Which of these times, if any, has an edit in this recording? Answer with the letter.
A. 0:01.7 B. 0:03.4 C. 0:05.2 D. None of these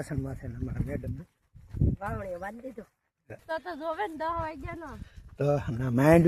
B